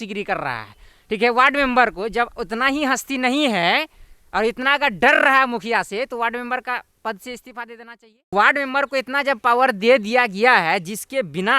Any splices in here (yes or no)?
yes